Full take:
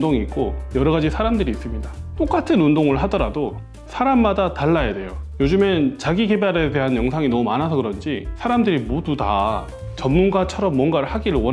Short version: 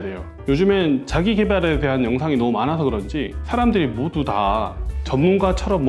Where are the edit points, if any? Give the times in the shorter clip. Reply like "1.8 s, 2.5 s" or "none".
none